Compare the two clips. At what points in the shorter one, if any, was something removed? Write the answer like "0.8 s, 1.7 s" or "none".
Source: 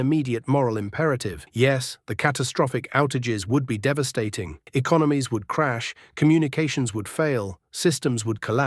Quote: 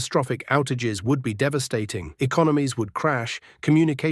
2.0 s